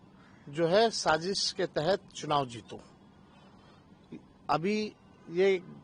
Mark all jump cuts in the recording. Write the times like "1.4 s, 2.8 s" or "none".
none